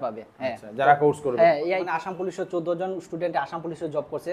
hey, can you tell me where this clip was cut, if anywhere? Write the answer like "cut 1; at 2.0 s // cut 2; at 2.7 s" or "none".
cut 1; at 1.8 s